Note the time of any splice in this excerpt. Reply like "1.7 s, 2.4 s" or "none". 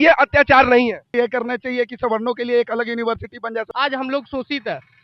1.1 s, 3.7 s